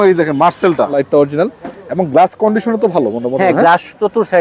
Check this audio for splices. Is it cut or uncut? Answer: cut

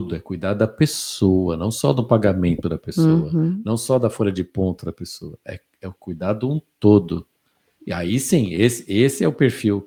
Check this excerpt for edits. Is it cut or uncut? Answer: uncut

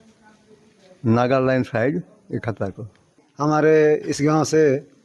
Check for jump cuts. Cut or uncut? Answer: cut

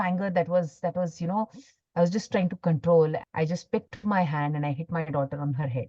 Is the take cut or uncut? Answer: cut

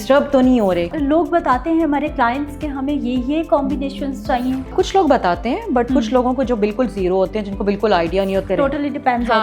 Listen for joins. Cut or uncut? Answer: cut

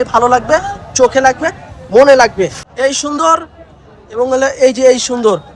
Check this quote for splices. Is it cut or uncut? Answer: cut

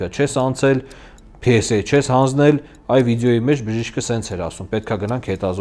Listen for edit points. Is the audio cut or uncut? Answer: uncut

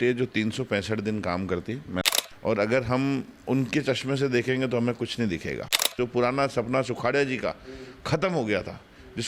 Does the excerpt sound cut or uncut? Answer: cut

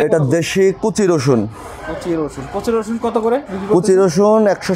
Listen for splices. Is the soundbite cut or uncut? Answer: uncut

